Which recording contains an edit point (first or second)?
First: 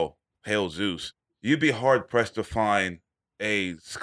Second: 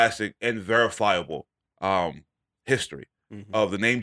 first